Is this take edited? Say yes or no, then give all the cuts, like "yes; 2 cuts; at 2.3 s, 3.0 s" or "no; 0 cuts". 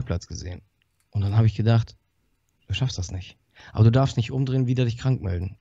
no; 0 cuts